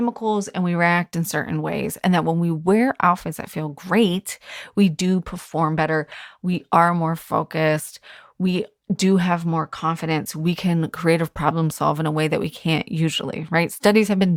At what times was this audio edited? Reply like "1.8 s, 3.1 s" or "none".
none